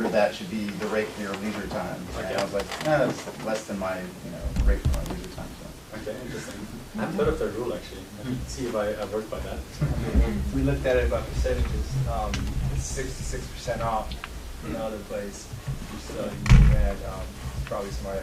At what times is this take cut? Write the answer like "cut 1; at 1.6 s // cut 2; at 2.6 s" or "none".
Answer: none